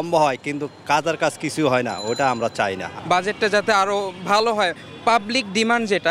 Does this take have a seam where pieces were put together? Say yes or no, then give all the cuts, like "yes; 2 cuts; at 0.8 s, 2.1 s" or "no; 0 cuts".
no; 0 cuts